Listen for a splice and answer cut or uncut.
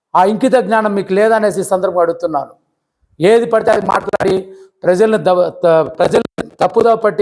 uncut